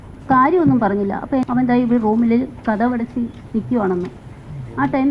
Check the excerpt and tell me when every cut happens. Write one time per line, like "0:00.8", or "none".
0:01.4